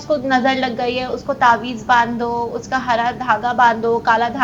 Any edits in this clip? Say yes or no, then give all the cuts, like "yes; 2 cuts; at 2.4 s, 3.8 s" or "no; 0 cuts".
no; 0 cuts